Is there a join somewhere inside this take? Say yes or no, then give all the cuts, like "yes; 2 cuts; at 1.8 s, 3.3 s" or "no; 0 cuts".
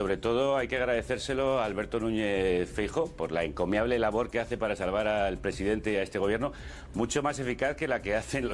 no; 0 cuts